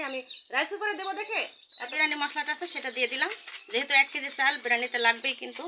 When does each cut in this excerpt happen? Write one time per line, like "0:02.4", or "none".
0:01.9